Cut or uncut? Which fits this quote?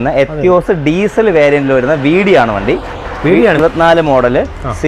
cut